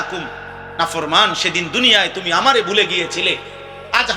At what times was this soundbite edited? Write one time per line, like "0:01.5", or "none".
none